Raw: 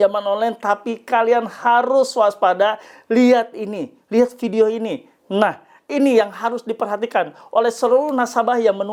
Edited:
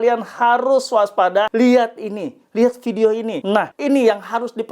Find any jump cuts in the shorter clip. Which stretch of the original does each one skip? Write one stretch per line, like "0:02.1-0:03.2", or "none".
0:02.7-0:03.1
0:05.1-0:05.7